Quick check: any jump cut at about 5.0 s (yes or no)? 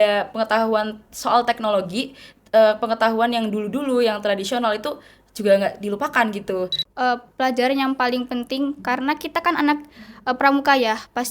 no